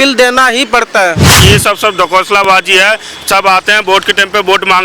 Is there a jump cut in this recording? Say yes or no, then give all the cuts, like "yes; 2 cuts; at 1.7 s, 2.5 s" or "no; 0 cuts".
yes; 1 cut; at 1.3 s